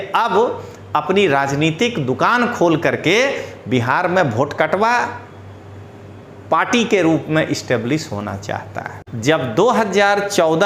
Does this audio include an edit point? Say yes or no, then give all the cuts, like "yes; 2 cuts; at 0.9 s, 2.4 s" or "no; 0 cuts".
yes; 1 cut; at 9.0 s